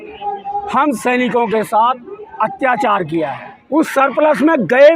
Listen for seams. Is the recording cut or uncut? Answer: cut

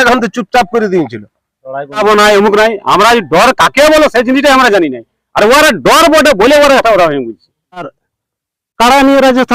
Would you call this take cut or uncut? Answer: cut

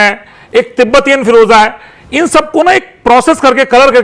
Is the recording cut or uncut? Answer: uncut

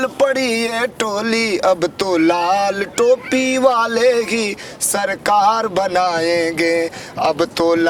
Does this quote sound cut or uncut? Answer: uncut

